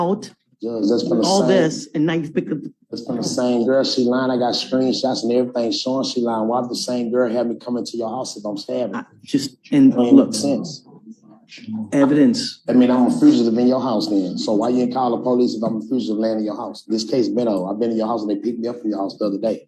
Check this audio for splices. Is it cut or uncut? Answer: uncut